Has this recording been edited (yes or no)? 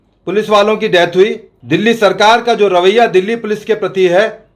yes